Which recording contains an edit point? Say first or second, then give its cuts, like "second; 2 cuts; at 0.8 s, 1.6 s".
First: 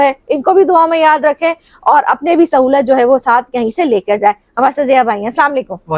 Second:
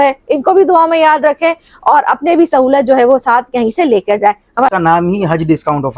second; 1 cut; at 4.7 s